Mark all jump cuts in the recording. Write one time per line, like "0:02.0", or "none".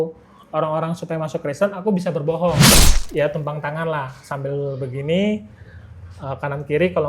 0:02.8